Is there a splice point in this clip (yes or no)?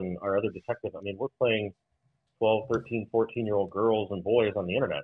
no